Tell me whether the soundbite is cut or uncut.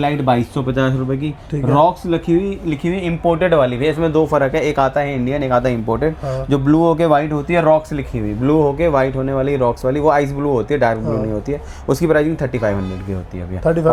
uncut